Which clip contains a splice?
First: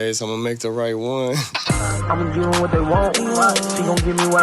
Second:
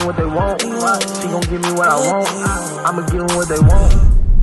first; 1 cut; at 1.5 s

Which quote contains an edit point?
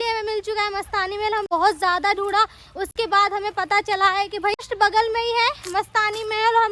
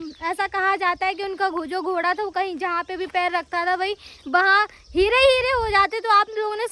first; 2 cuts; at 1.5 s, 4.7 s

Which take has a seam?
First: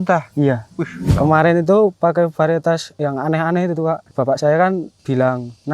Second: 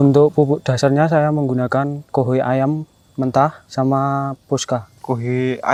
first; 4 cuts; at 1.0 s, 2.9 s, 4.1 s, 5.0 s

